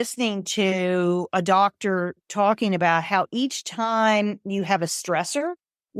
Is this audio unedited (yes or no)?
yes